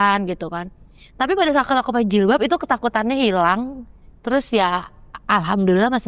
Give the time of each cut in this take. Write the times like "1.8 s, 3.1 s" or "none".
none